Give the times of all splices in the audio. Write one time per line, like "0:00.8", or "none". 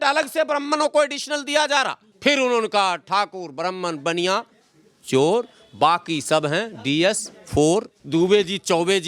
0:02.0
0:08.0